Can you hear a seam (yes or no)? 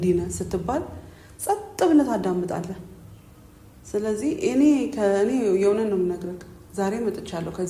no